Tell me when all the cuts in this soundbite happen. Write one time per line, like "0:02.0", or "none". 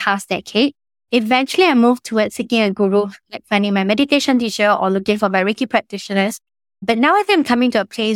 0:00.9